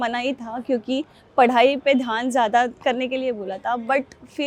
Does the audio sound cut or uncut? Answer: uncut